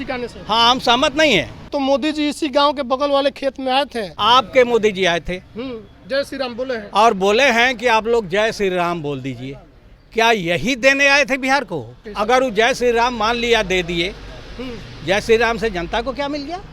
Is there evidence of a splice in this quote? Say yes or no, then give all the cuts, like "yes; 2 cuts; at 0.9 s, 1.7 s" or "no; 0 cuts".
yes; 3 cuts; at 1.7 s, 4.1 s, 12.0 s